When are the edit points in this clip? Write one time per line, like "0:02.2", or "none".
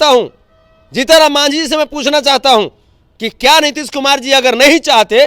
none